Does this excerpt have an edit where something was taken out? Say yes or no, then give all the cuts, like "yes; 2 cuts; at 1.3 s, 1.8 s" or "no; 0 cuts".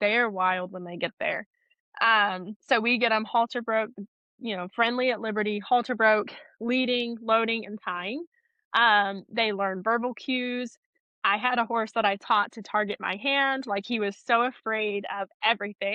no; 0 cuts